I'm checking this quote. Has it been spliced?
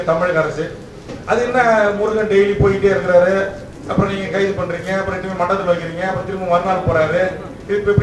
no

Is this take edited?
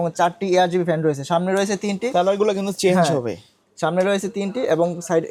no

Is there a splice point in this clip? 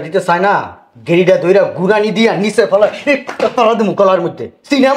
no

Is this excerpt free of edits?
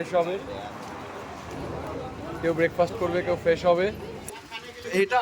no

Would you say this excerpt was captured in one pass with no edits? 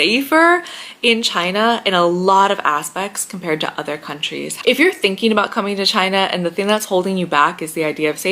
no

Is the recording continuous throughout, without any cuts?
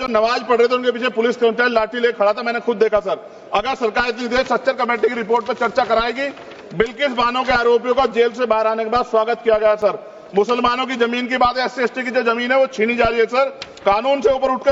yes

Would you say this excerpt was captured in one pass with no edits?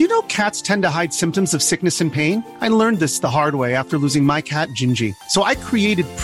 yes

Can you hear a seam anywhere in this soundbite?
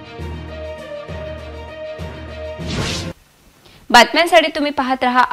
no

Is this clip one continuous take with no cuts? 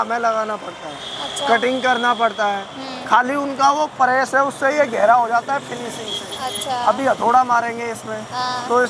yes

